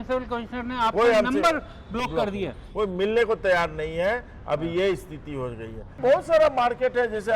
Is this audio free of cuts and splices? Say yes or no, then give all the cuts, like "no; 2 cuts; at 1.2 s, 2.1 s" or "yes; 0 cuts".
no; 1 cut; at 5.8 s